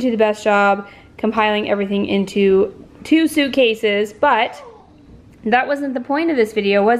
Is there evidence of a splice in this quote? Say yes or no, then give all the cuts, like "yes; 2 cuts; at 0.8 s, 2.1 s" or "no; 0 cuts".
no; 0 cuts